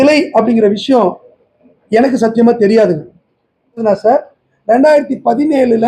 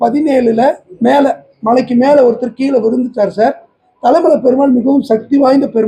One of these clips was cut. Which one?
first; 1 cut; at 3.8 s

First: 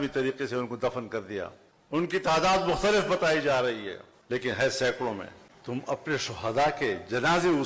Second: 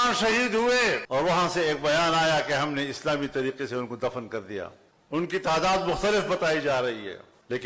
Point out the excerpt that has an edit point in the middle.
second; 1 cut; at 1.0 s

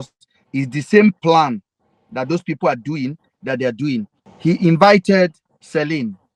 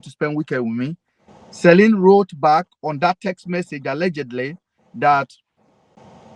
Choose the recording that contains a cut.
first; 1 cut; at 4.2 s

